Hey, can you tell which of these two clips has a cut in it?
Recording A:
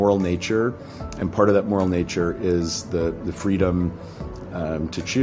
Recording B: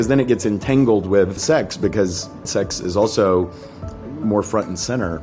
B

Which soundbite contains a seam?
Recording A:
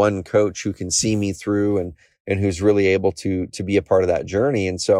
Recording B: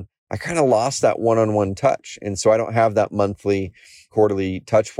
B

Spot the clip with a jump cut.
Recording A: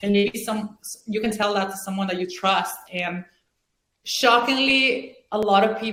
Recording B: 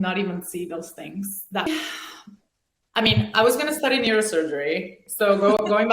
B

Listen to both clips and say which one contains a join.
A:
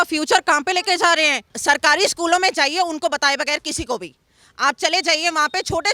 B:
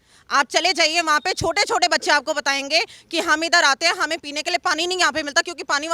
A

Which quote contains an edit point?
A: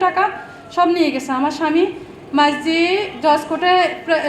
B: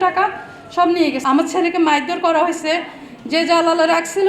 B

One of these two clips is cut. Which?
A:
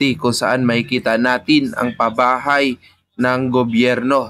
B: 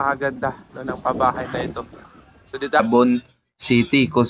B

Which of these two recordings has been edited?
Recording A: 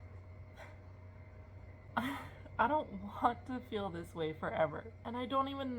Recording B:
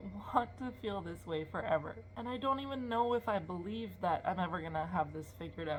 A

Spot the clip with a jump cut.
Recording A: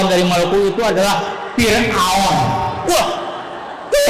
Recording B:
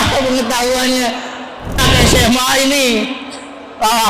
B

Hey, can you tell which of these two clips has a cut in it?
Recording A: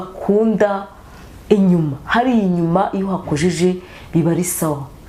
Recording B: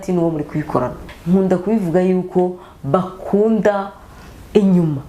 B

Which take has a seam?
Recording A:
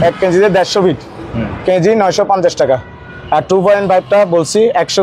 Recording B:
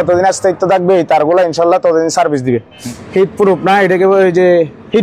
B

